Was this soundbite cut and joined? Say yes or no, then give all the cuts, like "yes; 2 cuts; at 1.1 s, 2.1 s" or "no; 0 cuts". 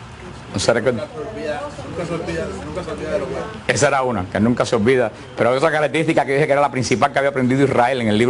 yes; 1 cut; at 5.2 s